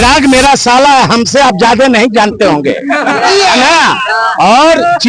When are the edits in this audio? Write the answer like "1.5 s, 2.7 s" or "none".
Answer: none